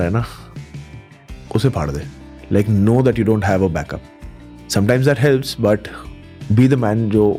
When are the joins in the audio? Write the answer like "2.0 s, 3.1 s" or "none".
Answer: none